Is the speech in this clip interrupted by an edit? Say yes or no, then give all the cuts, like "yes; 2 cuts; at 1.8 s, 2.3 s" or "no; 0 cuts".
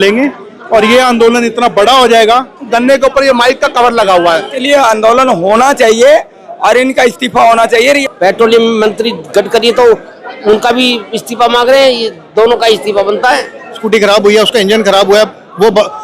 yes; 4 cuts; at 2.7 s, 4.5 s, 8.0 s, 13.8 s